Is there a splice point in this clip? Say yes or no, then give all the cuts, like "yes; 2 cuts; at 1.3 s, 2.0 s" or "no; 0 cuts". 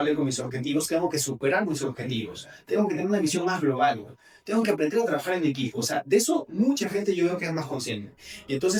no; 0 cuts